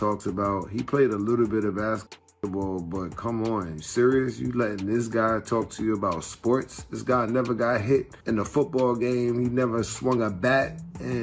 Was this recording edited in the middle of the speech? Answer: yes; 1 cut; at 8.1 s

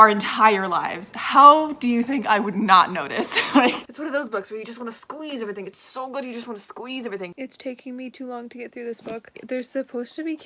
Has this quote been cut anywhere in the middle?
yes; 3 cuts; at 3.9 s, 7.3 s, 9.4 s

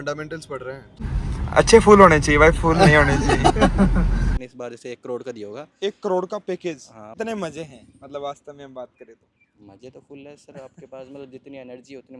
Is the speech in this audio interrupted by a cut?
yes; 3 cuts; at 1.0 s, 4.4 s, 7.2 s

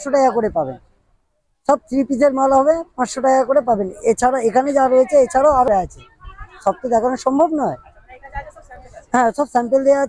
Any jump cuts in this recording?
no; 0 cuts

